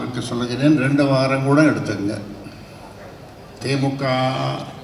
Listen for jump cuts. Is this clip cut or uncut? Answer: cut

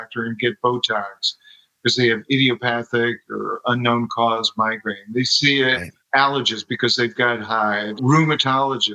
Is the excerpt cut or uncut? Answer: cut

